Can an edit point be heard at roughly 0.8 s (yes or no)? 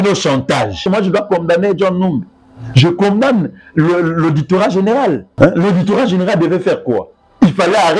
yes